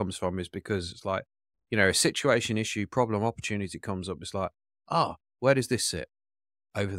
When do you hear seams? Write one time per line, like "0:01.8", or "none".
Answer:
none